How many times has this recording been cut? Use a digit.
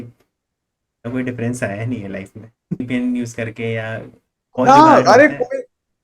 1